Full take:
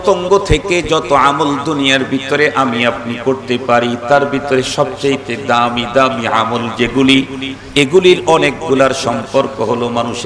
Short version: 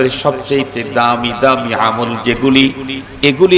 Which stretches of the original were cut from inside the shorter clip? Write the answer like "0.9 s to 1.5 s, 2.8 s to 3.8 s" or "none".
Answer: none

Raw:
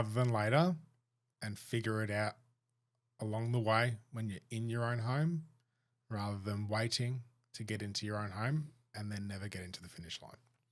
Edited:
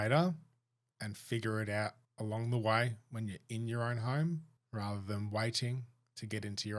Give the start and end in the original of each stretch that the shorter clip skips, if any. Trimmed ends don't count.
2.5 s to 3.1 s, 5.6 s to 5.9 s

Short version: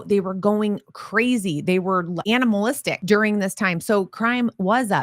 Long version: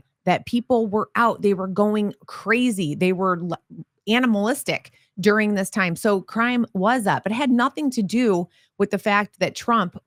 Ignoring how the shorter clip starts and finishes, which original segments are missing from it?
3.5 s to 4.0 s, 4.7 s to 5.1 s

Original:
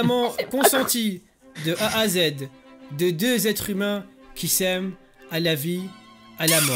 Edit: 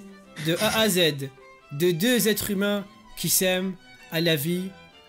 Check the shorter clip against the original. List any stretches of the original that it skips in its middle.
none

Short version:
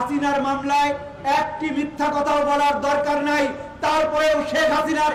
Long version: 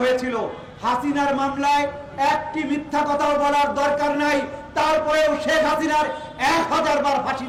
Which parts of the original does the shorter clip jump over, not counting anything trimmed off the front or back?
none

